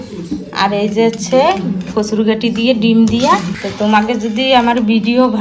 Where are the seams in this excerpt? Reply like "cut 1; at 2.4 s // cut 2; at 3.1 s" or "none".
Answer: cut 1; at 3.6 s